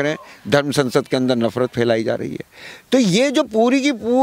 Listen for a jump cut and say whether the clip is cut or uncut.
uncut